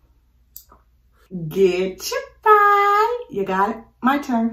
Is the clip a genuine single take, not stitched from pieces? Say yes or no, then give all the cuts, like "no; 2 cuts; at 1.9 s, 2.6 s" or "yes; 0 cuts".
no; 1 cut; at 1.1 s